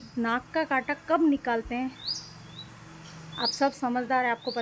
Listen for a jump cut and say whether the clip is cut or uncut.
uncut